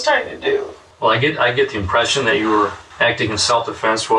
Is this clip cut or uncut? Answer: cut